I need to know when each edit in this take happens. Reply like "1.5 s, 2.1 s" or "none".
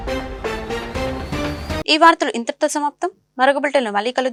none